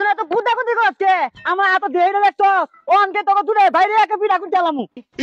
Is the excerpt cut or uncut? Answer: uncut